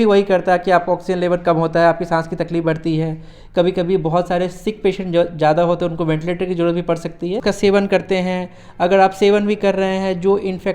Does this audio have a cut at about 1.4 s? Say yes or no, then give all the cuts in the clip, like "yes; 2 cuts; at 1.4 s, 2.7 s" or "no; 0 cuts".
no; 1 cut; at 7.4 s